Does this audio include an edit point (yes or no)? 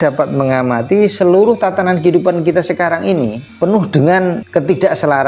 yes